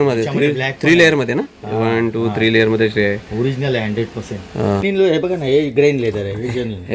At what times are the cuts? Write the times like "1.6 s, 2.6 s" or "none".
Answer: 4.8 s